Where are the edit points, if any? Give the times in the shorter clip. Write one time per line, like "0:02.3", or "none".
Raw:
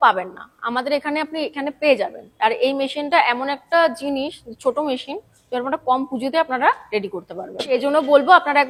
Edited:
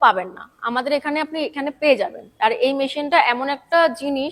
none